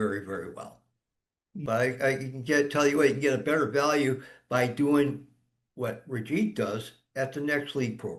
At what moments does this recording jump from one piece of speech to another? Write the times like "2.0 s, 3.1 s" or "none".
1.6 s